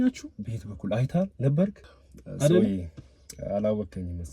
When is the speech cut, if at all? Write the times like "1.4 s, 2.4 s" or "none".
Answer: 1.8 s